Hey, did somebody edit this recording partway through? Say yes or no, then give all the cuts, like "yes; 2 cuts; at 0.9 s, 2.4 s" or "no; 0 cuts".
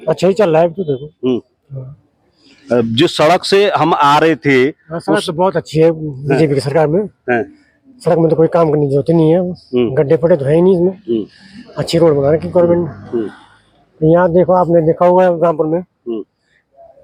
no; 0 cuts